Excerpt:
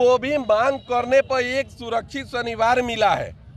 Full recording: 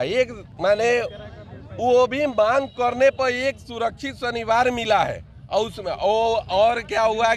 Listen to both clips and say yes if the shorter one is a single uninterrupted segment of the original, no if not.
yes